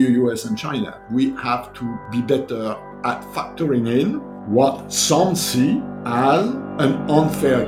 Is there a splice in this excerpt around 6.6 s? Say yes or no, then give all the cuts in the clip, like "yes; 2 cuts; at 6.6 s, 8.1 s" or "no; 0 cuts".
yes; 6 cuts; at 1.0 s, 2.0 s, 3.3 s, 4.3 s, 6.0 s, 6.6 s